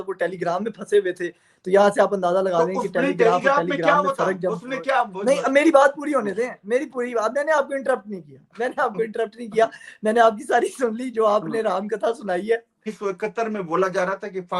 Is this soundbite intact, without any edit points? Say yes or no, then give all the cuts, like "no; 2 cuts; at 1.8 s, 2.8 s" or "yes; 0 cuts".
no; 1 cut; at 12.9 s